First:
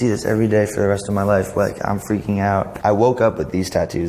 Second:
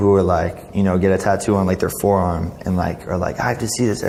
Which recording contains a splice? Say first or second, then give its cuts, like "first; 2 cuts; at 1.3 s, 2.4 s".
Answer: first; 1 cut; at 2.7 s